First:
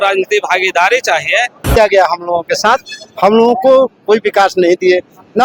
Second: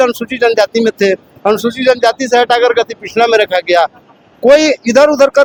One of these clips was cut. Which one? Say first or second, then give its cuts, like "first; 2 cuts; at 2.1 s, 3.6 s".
first; 1 cut; at 1.8 s